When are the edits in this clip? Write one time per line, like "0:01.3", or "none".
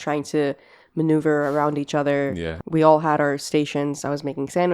0:02.5